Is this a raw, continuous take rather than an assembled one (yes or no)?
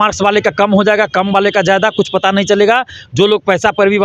yes